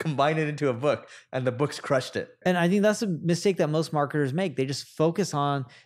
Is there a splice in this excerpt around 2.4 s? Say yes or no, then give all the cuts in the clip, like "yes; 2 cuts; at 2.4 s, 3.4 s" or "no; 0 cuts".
yes; 1 cut; at 2.4 s